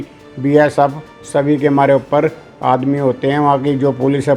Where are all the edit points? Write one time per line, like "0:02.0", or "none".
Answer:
none